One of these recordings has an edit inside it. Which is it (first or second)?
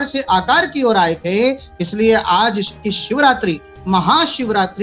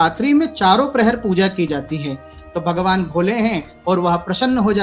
second